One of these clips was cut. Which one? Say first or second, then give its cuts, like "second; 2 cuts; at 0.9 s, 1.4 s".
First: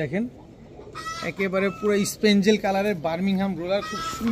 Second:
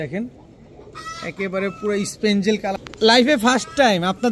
second; 1 cut; at 2.8 s